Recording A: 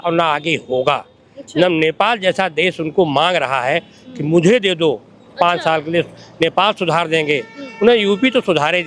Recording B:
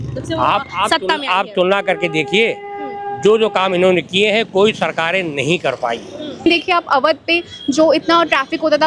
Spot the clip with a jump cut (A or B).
B